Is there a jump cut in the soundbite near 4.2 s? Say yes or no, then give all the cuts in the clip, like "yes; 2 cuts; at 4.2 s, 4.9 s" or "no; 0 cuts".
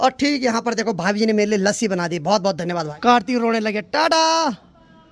no; 1 cut; at 2.9 s